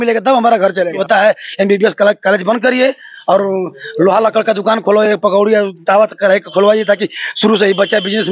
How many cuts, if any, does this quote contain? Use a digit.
1